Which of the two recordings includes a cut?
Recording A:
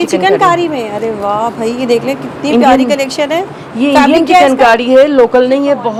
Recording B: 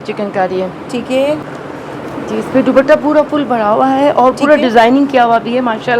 B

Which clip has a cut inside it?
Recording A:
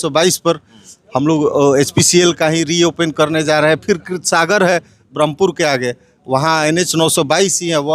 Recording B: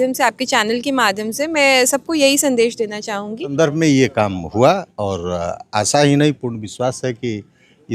B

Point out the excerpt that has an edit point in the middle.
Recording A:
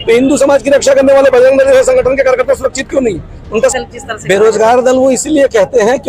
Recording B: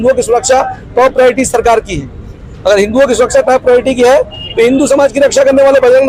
A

